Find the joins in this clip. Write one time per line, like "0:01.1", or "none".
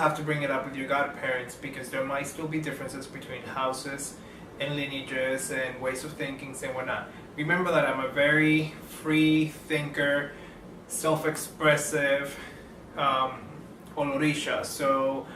0:03.5